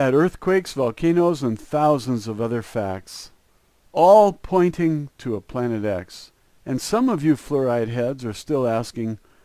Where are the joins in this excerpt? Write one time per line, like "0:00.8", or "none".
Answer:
none